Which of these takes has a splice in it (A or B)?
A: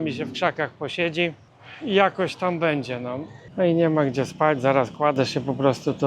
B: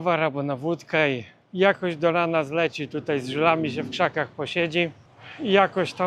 A